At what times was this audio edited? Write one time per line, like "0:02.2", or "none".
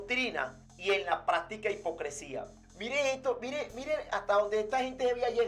none